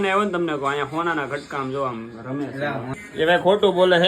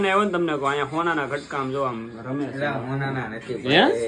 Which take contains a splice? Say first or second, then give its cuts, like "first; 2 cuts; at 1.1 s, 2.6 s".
first; 1 cut; at 3.0 s